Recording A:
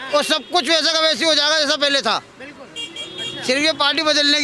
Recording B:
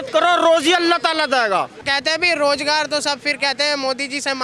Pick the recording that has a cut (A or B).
B